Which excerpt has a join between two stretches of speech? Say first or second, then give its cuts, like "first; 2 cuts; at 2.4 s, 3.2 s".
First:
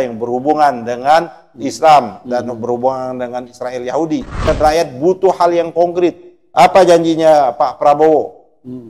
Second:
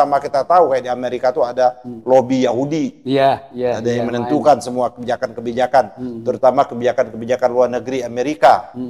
first; 1 cut; at 4.4 s